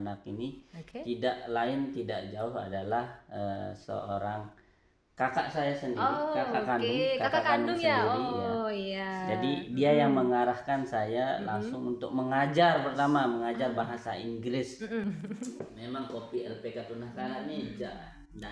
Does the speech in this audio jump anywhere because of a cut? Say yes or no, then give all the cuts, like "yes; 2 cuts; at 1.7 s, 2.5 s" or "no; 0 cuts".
yes; 1 cut; at 15.0 s